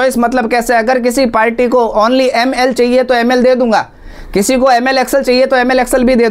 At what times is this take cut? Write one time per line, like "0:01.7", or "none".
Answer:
none